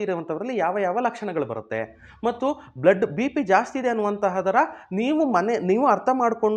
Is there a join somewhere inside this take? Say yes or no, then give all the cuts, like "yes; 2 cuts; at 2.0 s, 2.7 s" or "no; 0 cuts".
no; 0 cuts